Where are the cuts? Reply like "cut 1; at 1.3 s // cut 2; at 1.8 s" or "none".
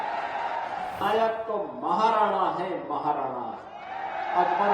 cut 1; at 1.0 s

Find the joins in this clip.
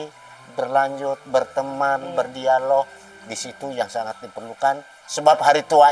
none

